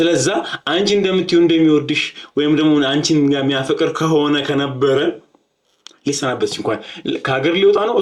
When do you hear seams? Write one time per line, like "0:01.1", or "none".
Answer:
none